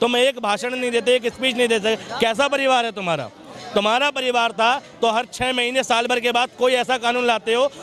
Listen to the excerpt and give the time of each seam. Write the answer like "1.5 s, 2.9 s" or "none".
none